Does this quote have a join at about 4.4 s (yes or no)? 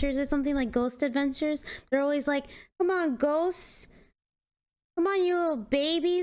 no